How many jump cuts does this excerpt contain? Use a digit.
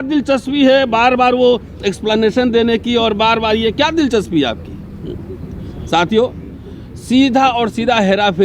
0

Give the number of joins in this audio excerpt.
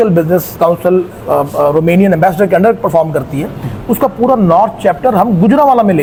0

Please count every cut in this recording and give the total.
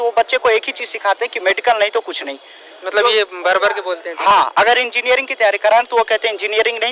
0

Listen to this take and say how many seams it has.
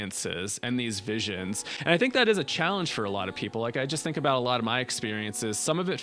0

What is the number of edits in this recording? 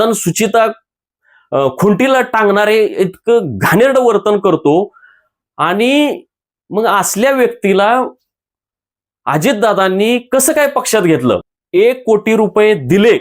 1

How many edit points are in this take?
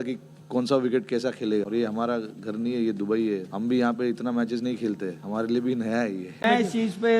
2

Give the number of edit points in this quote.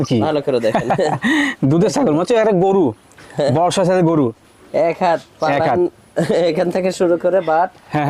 0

